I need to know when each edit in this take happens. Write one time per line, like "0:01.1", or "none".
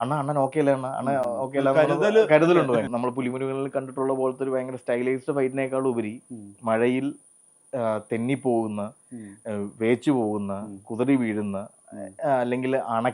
0:02.9